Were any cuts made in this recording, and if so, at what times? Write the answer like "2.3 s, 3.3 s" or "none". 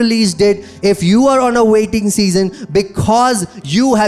none